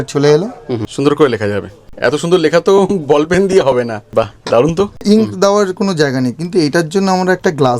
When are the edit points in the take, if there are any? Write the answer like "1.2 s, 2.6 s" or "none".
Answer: 0.9 s, 1.9 s, 4.0 s, 5.0 s